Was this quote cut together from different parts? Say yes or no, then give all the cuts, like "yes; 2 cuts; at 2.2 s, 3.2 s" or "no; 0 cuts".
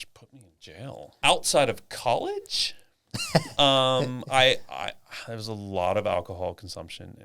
yes; 1 cut; at 1.2 s